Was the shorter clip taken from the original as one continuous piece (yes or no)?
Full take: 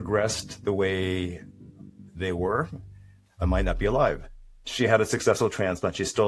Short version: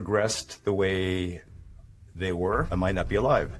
no